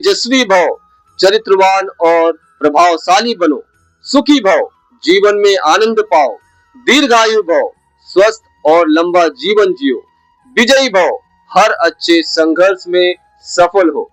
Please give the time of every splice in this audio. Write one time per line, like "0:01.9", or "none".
none